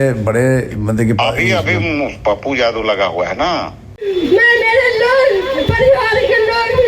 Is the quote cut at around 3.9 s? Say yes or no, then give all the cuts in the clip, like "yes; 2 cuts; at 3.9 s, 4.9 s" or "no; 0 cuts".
yes; 1 cut; at 3.9 s